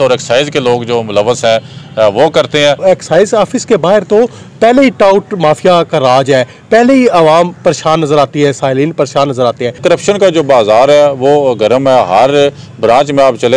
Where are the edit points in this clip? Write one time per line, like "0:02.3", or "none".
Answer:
0:02.8
0:09.8

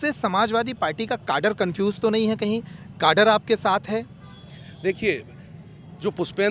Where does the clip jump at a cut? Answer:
none

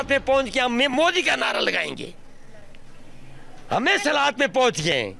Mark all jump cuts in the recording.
none

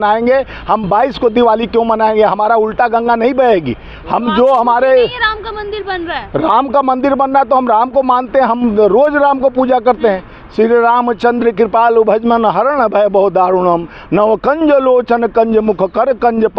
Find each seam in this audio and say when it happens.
none

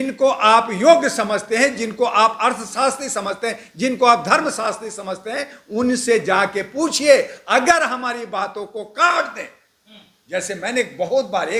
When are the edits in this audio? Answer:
none

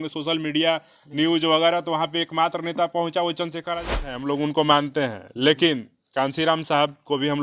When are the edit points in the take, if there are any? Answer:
0:04.1

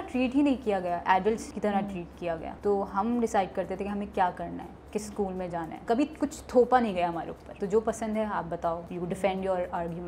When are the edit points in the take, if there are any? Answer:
0:01.5
0:02.5
0:05.8
0:07.4
0:08.9

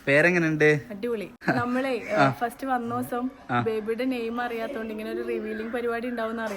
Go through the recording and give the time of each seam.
0:01.3

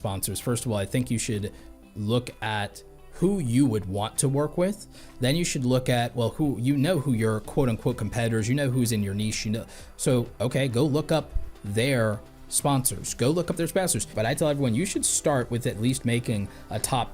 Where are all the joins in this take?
0:14.1

